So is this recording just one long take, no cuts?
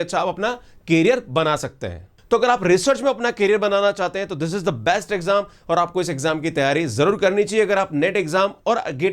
no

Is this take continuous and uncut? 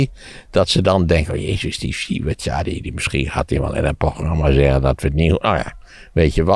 yes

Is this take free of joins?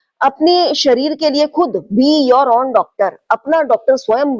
yes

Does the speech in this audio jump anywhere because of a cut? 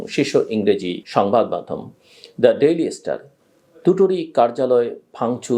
no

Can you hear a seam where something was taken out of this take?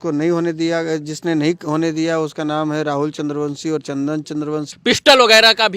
yes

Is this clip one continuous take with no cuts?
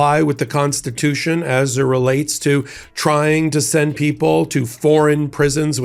yes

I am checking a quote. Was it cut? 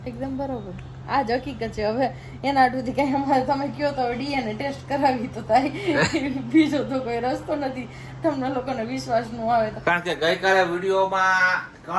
no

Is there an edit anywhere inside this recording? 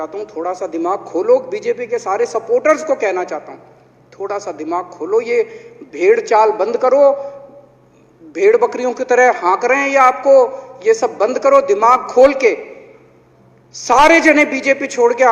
no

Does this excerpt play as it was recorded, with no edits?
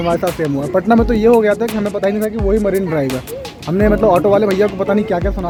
yes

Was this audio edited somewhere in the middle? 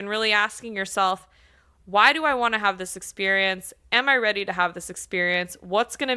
no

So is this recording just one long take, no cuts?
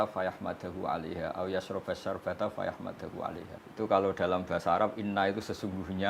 no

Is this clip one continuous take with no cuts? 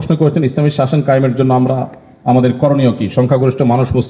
yes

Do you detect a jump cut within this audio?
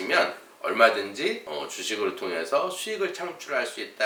no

